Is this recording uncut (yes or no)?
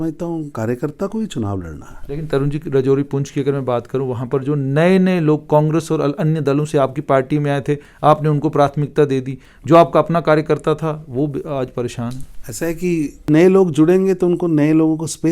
no